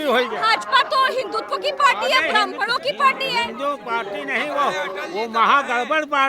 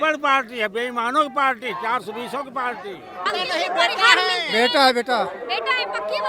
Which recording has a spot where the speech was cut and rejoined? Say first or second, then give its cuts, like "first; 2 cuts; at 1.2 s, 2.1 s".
second; 1 cut; at 3.3 s